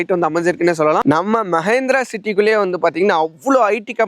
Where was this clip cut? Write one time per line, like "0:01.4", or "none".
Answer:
0:01.1

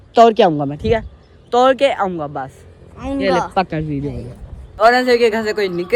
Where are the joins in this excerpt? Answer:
0:04.7

